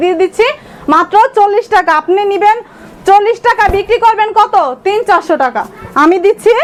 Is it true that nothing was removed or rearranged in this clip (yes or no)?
yes